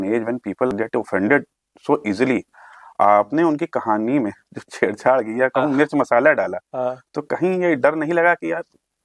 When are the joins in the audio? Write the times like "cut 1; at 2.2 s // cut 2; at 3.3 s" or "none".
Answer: none

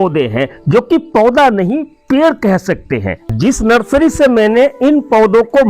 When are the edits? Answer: cut 1; at 3.2 s

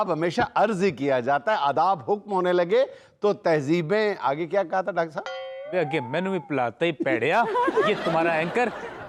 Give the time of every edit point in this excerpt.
none

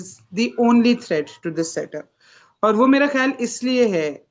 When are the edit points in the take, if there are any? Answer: none

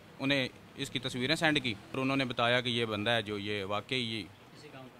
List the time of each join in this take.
cut 1; at 2.0 s

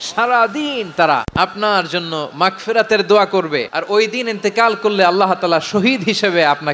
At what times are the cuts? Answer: cut 1; at 1.3 s // cut 2; at 3.7 s

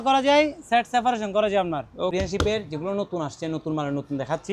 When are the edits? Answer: cut 1; at 2.1 s

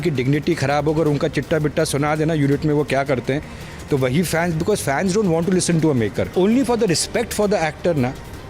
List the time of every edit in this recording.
cut 1; at 6.3 s

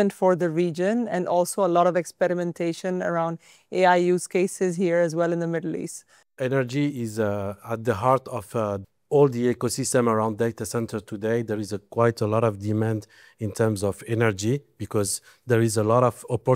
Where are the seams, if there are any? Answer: cut 1; at 6.3 s // cut 2; at 8.8 s

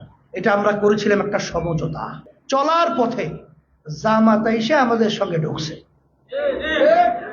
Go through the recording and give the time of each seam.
cut 1; at 2.3 s

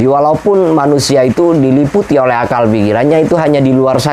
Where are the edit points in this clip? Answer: none

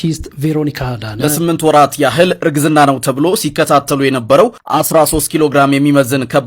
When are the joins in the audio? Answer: cut 1; at 1.2 s

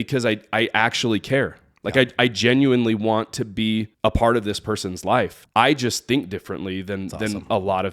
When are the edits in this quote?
cut 1; at 3.9 s // cut 2; at 5.4 s

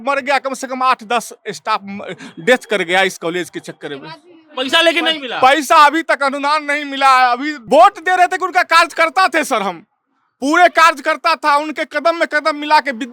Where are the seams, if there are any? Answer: cut 1; at 7.5 s

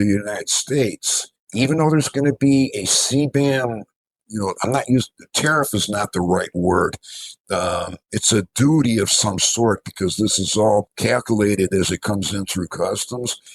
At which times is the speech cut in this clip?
none

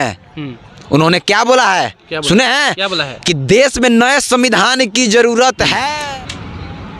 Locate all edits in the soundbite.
cut 1; at 5.9 s

